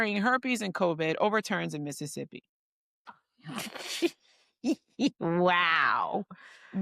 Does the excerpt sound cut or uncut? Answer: uncut